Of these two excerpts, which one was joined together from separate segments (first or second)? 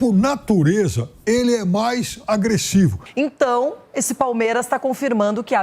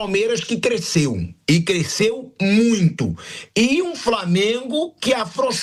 first